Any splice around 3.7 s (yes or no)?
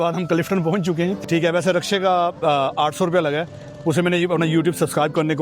no